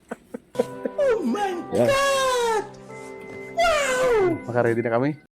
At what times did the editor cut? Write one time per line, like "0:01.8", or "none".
0:00.9
0:04.4